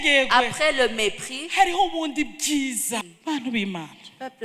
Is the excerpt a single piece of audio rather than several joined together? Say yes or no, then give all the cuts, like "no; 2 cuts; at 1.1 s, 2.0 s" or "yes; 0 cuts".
no; 1 cut; at 3.1 s